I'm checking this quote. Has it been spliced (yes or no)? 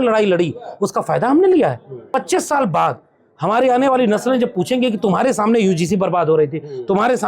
yes